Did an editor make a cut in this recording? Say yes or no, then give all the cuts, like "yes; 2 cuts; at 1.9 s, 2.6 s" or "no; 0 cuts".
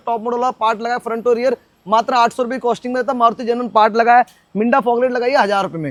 no; 0 cuts